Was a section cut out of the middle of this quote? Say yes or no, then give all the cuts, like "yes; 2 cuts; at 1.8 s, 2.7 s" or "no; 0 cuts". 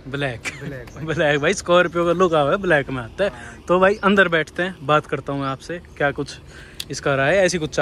no; 0 cuts